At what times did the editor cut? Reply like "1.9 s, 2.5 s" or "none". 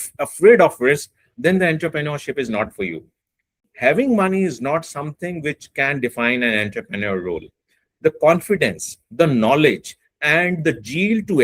3.7 s